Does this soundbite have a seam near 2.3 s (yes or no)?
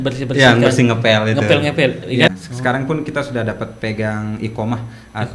yes